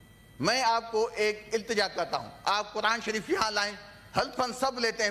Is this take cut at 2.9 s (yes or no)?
no